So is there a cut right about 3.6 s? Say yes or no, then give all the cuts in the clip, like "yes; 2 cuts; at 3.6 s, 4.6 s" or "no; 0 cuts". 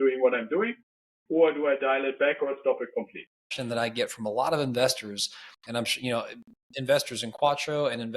yes; 1 cut; at 3.6 s